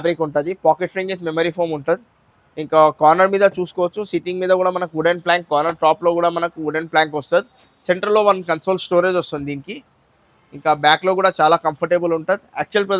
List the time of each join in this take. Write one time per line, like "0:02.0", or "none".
none